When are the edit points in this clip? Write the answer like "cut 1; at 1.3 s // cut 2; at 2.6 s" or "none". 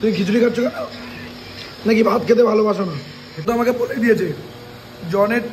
cut 1; at 3.4 s